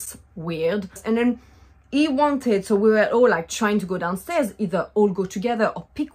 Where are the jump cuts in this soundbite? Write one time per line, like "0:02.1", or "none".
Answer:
none